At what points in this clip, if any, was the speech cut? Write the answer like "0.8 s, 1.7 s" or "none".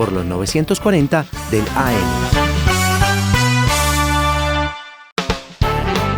2.0 s, 4.9 s